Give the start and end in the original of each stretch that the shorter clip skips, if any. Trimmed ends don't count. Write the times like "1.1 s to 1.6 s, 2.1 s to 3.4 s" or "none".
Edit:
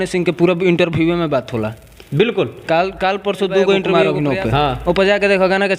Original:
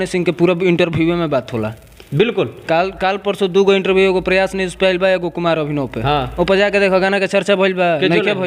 3.9 s to 5.4 s